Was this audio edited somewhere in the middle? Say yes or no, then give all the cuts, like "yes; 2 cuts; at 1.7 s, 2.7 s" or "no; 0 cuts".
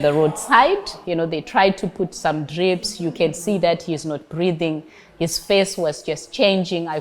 yes; 1 cut; at 1.0 s